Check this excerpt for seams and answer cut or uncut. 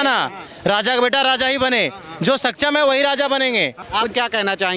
cut